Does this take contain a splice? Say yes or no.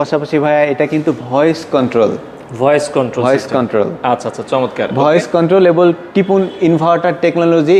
no